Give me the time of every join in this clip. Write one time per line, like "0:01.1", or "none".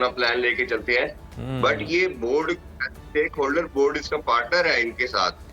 none

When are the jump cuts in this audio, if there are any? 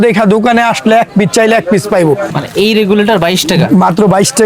0:02.2

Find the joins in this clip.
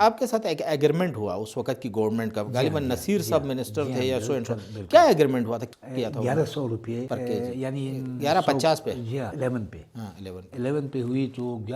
0:05.6
0:07.1
0:08.2
0:09.3

